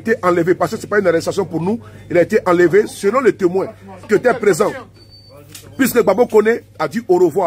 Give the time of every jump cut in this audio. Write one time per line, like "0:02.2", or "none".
0:04.0